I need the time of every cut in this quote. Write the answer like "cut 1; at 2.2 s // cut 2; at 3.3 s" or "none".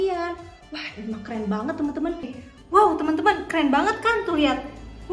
cut 1; at 2.4 s